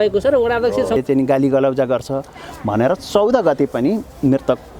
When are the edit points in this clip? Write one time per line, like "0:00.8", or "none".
0:01.0